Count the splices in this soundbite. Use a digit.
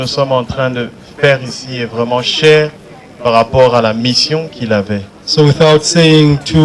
0